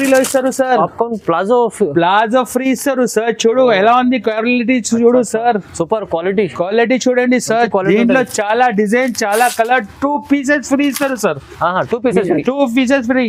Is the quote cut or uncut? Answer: uncut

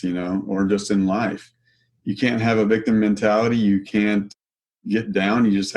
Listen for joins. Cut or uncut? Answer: cut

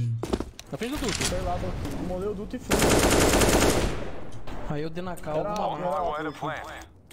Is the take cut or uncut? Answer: uncut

